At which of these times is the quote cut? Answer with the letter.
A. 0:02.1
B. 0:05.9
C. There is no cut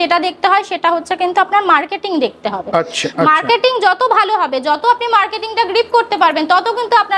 C